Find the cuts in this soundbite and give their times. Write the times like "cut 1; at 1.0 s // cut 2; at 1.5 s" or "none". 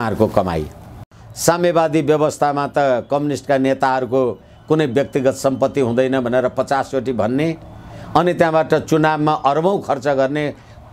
cut 1; at 1.0 s